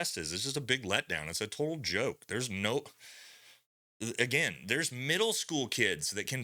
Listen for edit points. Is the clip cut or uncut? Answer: uncut